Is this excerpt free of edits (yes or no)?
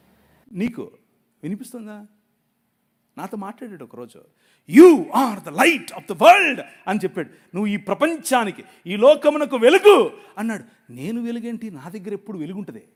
yes